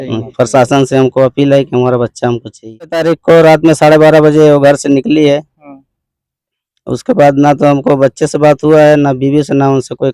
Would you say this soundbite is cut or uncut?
cut